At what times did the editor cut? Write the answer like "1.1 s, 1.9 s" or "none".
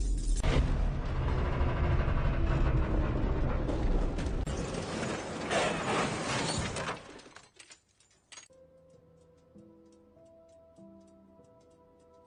none